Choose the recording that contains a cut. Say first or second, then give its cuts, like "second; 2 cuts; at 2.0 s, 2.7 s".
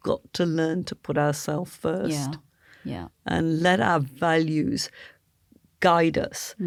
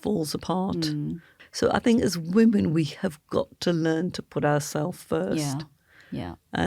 second; 1 cut; at 1.3 s